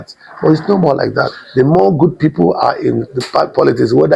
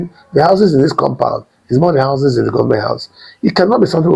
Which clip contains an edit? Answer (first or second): first